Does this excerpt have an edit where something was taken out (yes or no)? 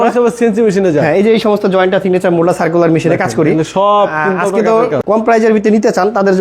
yes